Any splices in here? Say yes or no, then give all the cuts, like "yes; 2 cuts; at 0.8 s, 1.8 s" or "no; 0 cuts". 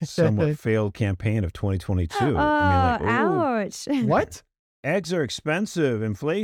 no; 0 cuts